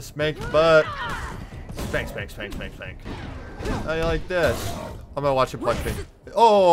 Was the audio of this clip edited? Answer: yes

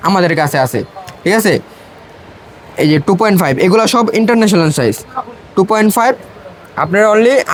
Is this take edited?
no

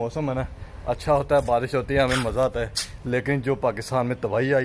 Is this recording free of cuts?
yes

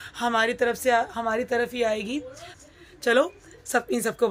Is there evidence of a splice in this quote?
yes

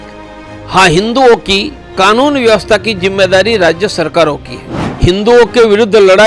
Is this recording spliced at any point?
yes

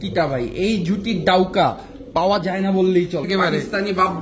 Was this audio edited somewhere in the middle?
yes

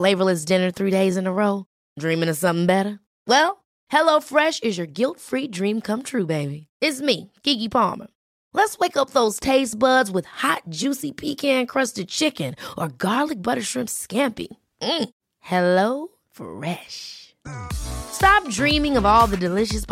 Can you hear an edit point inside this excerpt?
no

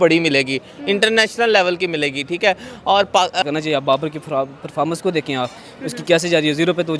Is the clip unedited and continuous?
no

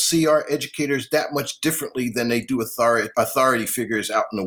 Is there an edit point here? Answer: yes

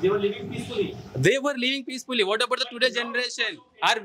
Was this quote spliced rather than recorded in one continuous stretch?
no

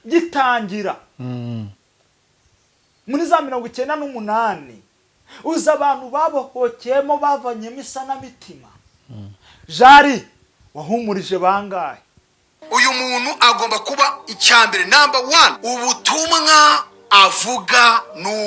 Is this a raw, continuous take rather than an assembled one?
no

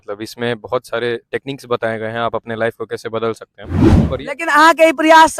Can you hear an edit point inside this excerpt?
yes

